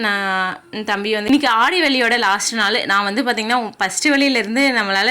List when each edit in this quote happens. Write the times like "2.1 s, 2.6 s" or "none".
1.3 s